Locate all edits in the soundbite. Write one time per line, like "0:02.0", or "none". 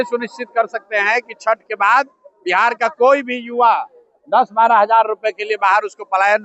none